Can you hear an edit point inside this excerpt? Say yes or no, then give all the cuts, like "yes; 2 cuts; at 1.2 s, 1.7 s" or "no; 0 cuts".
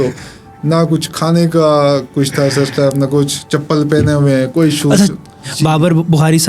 yes; 1 cut; at 5.4 s